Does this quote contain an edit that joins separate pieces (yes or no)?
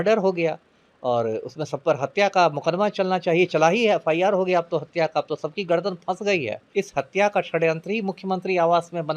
yes